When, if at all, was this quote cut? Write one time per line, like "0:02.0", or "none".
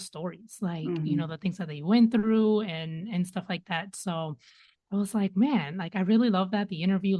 none